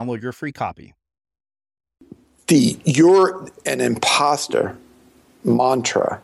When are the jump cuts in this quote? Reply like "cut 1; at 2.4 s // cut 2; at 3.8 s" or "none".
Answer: cut 1; at 2.3 s

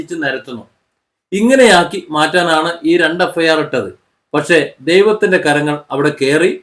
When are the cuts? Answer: none

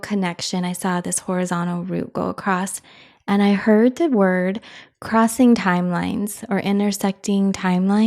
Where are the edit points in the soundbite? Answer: none

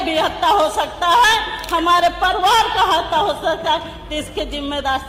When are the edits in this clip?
none

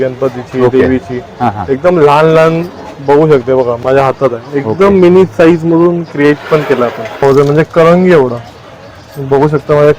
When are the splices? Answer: cut 1; at 7.2 s

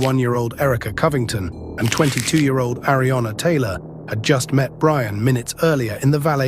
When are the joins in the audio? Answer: cut 1; at 1.6 s // cut 2; at 2.9 s

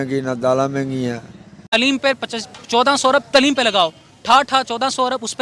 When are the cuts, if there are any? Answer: cut 1; at 1.6 s

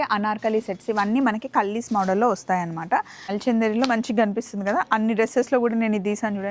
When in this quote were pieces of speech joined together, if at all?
cut 1; at 3.3 s

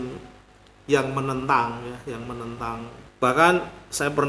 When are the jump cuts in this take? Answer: cut 1; at 3.0 s

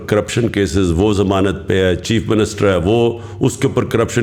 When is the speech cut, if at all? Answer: none

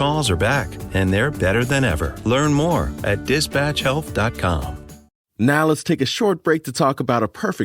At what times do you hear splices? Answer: cut 1; at 5.0 s

